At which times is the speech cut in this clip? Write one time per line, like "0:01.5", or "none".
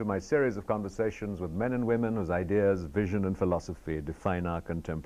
none